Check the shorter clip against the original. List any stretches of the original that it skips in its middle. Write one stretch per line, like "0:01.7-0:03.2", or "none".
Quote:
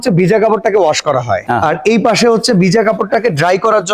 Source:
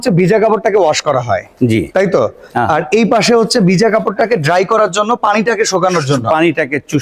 0:01.4-0:02.5